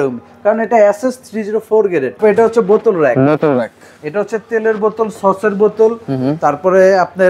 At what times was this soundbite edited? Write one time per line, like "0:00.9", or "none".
0:02.2